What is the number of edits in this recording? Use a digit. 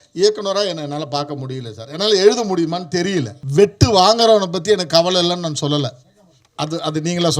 1